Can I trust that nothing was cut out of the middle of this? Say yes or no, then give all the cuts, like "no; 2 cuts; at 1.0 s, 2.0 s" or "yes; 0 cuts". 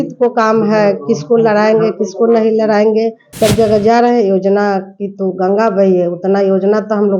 no; 1 cut; at 3.2 s